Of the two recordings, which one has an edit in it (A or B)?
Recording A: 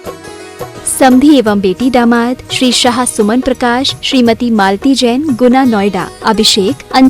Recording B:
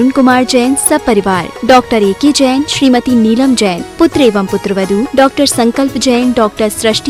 A